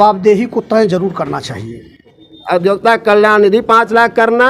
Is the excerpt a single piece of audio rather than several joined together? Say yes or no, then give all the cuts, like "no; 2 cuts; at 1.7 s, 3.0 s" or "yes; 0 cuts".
no; 1 cut; at 2.3 s